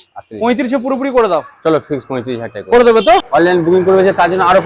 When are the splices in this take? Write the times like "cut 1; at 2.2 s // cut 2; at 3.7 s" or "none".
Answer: cut 1; at 3.3 s